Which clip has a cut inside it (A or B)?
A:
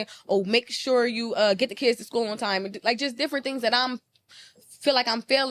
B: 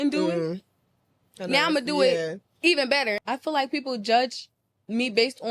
B